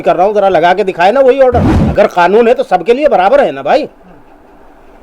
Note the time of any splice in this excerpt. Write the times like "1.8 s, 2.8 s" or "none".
1.8 s